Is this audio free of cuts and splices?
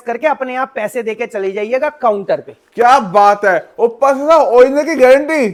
yes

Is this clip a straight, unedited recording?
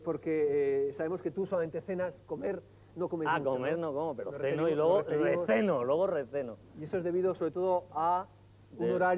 no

